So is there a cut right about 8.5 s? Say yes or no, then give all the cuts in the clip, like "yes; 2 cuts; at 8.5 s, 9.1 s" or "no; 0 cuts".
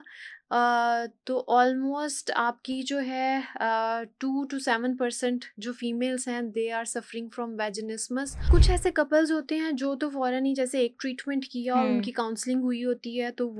yes; 1 cut; at 8.5 s